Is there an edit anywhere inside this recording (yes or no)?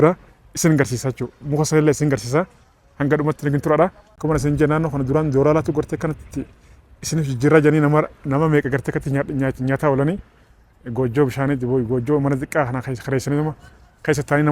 yes